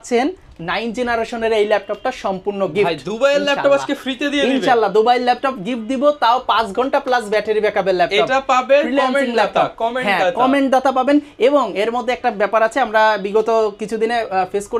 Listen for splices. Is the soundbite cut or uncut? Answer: uncut